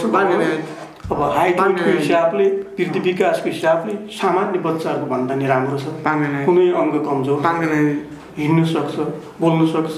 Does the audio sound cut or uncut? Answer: uncut